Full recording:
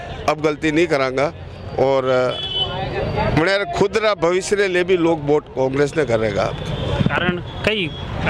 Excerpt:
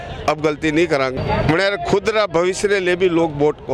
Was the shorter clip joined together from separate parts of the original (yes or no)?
yes